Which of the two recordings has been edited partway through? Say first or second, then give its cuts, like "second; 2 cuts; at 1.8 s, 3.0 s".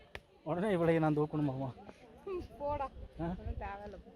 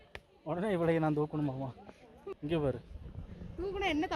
second; 1 cut; at 2.2 s